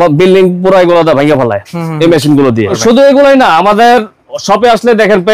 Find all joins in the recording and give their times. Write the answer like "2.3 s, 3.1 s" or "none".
2.7 s